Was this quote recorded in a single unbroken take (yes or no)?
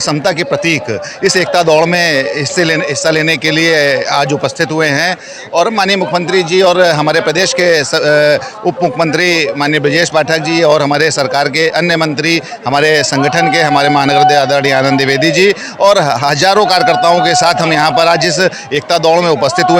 yes